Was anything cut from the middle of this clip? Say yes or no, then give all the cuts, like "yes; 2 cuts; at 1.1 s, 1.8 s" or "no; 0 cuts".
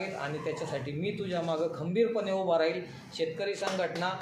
no; 0 cuts